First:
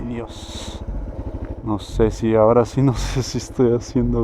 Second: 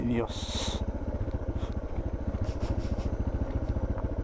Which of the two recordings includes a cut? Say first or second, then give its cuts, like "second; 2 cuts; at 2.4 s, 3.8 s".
first; 1 cut; at 1.1 s